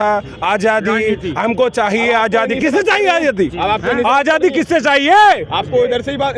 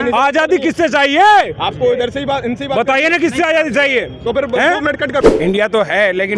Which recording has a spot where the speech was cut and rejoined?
second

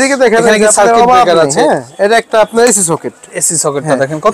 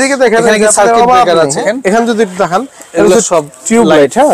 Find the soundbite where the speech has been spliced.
second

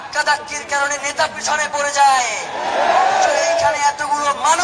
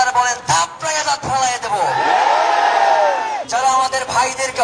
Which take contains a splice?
second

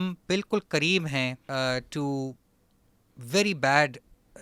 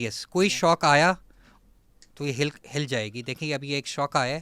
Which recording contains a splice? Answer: first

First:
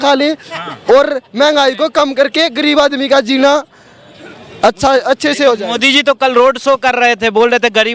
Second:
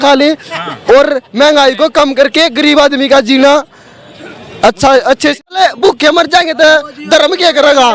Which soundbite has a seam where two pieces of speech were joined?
second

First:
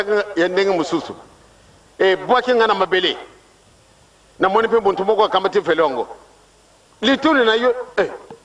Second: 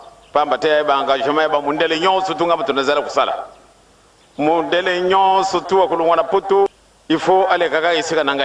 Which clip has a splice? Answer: second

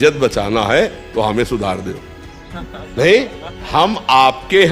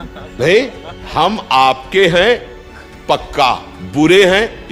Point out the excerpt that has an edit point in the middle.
second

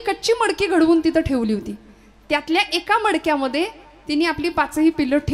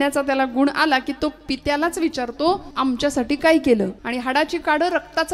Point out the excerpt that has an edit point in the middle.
second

